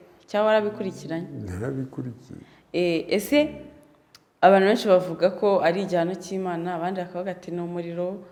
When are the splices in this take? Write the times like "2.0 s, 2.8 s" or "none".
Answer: none